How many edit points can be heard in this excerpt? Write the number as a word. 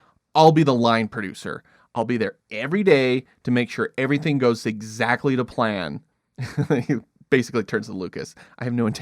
zero